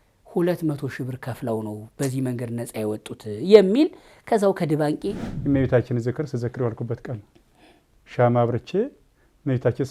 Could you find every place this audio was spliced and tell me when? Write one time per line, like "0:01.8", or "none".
0:05.2

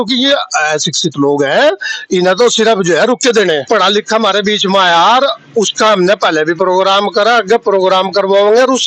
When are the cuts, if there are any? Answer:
0:03.6

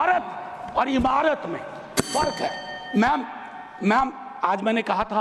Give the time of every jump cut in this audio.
none

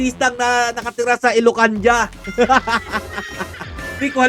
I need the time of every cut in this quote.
0:02.2

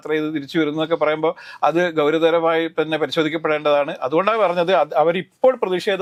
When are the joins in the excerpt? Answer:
none

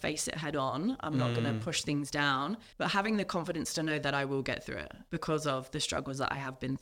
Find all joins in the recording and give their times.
0:02.7
0:04.9

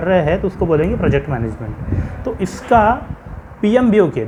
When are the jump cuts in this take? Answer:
none

